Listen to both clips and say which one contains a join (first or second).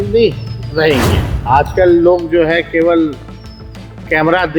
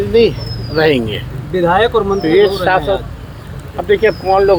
first